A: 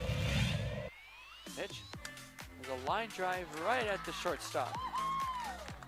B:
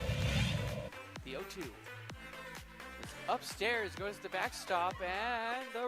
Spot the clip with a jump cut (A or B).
B